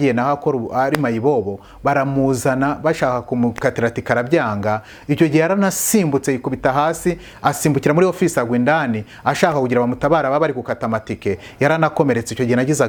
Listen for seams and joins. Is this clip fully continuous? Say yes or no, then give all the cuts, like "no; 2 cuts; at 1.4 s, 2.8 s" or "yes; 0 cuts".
yes; 0 cuts